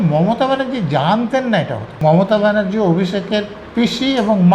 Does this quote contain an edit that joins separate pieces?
yes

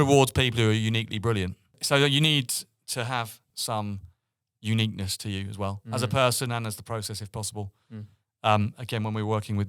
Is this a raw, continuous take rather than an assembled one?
no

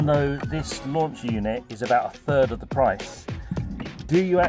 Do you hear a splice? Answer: no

